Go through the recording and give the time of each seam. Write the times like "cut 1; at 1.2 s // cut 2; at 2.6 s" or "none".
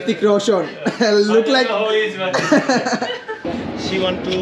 cut 1; at 3.4 s